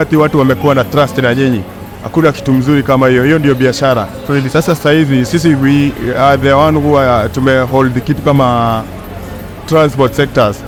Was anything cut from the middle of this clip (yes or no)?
no